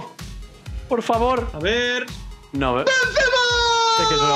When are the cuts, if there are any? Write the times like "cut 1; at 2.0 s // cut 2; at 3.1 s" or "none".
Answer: cut 1; at 2.1 s